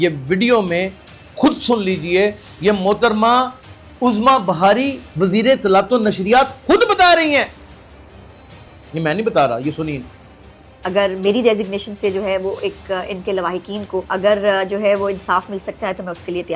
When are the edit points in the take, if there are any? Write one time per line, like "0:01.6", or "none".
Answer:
none

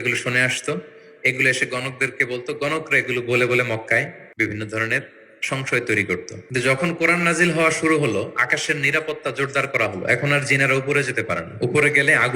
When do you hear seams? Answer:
0:04.2
0:06.4

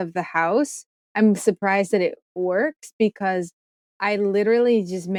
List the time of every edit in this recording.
none

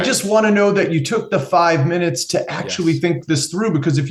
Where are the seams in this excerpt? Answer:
none

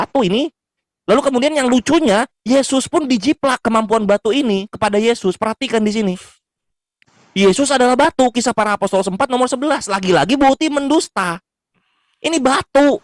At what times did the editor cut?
none

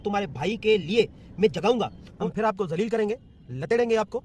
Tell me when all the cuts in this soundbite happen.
0:02.1

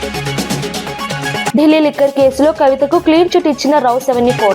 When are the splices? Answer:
0:01.2

